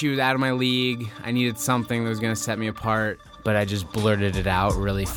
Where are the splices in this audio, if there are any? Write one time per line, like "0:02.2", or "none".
0:03.3